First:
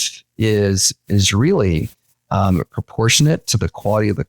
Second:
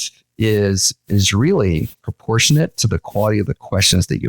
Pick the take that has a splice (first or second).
second